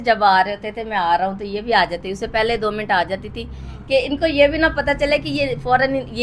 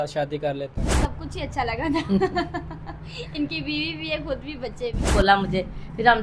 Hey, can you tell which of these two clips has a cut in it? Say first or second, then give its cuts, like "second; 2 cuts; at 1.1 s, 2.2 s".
second; 2 cuts; at 1.1 s, 5.1 s